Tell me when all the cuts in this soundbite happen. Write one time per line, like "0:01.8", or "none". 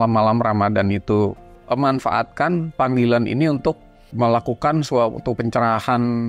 0:01.5
0:04.1